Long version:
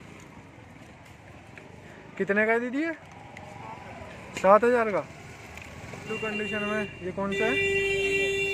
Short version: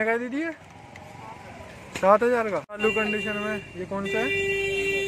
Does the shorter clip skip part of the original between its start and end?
yes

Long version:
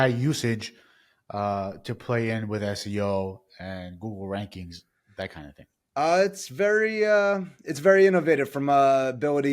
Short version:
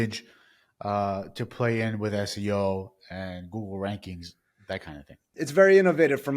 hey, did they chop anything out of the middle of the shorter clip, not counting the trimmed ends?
yes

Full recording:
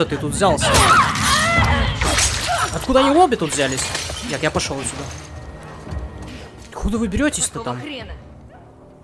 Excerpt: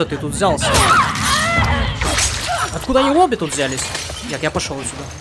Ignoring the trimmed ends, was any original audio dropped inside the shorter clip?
no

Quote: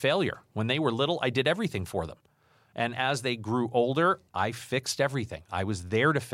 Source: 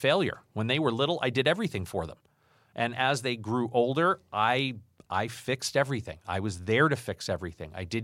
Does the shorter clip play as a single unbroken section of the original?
no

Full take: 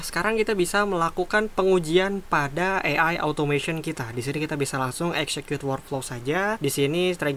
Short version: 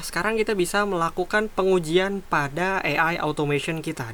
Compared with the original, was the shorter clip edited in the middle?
no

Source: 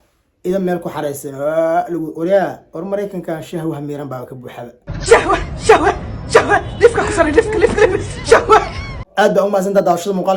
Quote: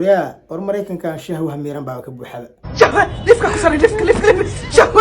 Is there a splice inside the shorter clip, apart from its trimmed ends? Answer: yes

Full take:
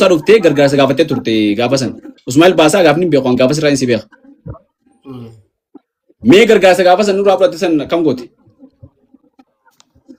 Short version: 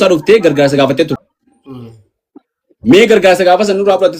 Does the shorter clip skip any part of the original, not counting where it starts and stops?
yes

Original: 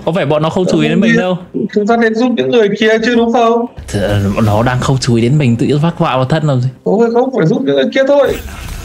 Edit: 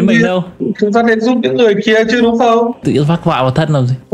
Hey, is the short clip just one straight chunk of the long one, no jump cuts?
no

